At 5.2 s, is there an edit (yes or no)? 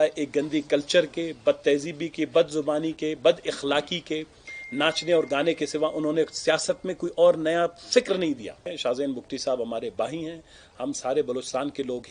no